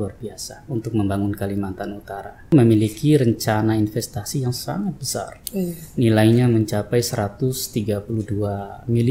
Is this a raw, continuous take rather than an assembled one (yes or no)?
no